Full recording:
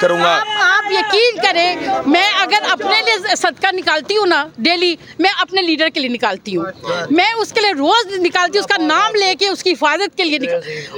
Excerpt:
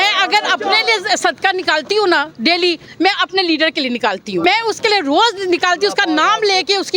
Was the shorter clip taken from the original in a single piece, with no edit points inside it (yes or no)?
no